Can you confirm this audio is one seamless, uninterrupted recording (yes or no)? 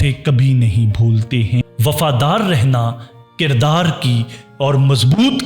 no